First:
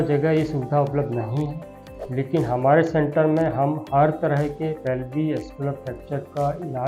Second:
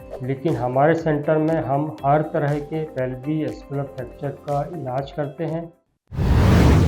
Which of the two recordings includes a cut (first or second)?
second